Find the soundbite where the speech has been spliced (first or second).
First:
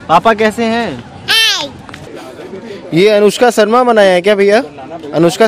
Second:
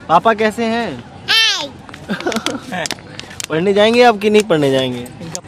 first